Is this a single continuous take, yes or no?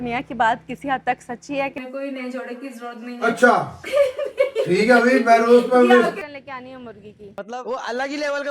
no